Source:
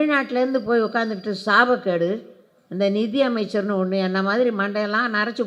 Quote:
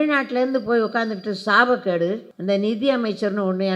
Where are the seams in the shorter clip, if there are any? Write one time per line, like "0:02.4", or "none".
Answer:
0:02.3